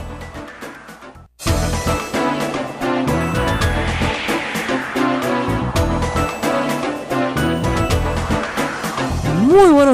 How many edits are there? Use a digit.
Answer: 2